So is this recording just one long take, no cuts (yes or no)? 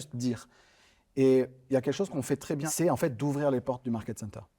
no